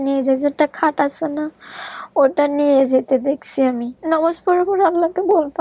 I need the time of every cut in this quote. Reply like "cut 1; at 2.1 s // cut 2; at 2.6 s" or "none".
cut 1; at 3.9 s